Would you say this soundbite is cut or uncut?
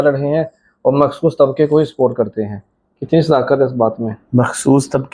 uncut